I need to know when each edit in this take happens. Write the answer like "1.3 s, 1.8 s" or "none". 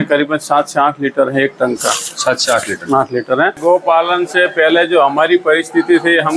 3.6 s